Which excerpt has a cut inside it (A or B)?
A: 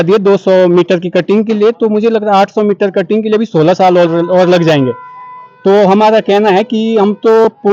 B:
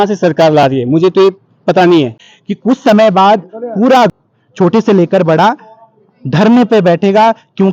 B